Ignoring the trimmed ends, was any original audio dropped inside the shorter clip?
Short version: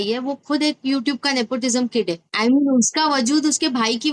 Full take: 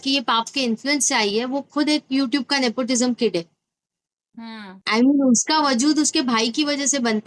yes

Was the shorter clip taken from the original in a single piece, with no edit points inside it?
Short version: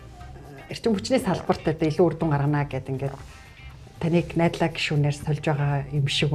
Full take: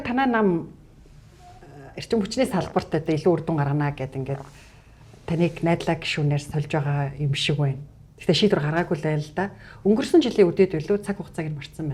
yes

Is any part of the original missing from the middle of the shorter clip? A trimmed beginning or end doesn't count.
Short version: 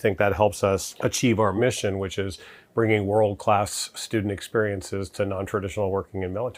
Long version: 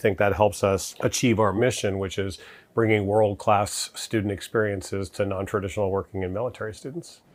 no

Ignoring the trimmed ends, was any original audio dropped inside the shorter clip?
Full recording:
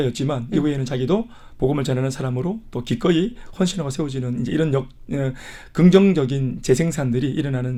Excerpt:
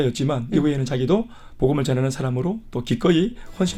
no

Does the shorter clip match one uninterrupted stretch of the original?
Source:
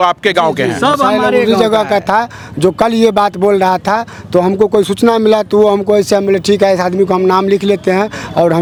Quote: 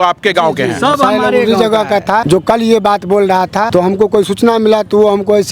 no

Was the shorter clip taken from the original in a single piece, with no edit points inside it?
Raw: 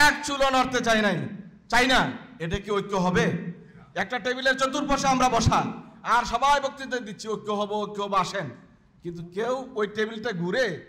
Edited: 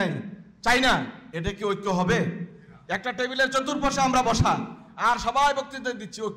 yes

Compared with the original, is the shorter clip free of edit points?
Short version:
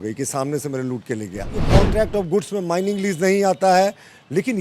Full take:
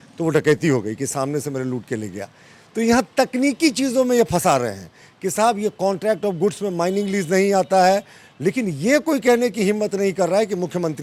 no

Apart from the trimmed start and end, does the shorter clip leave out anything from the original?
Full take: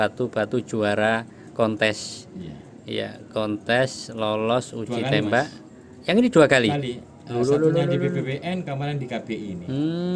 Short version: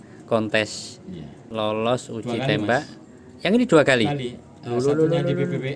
yes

